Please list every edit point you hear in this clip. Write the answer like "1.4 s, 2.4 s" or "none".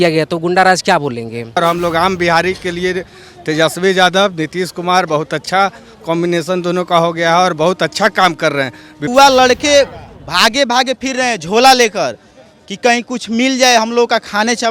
1.6 s, 9.1 s